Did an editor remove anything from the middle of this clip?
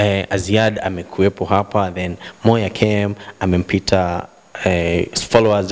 no; 0 cuts

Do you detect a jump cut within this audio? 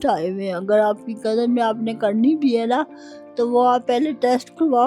no; 0 cuts

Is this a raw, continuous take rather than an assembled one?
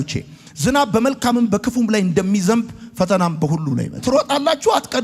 no; 1 cut; at 4.0 s

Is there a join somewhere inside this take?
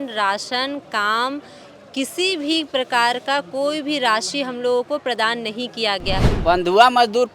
yes; 1 cut; at 6.2 s

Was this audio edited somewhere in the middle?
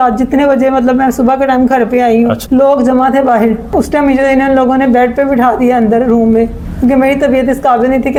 no; 0 cuts

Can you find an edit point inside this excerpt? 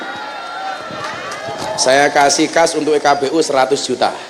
no; 0 cuts

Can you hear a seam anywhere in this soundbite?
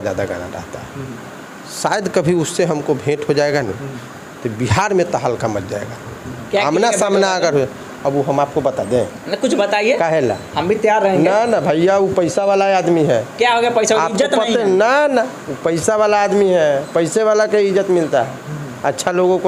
no; 0 cuts

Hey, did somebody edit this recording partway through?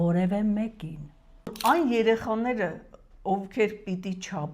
yes; 1 cut; at 1.5 s

